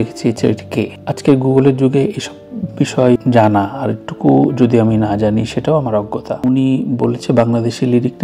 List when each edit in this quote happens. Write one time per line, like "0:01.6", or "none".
0:06.4